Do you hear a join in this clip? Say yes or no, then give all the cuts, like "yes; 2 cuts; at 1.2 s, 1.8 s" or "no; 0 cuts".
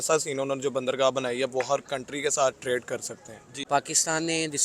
yes; 1 cut; at 3.1 s